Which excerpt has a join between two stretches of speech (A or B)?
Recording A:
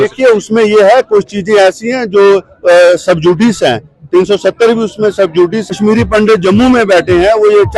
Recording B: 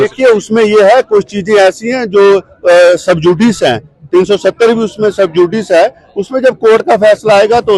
A